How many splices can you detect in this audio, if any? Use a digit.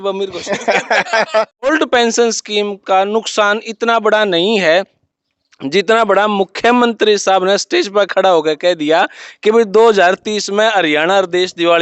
1